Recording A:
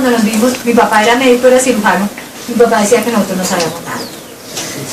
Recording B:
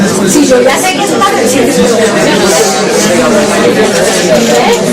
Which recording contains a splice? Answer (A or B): B